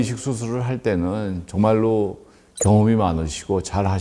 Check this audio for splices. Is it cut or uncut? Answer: uncut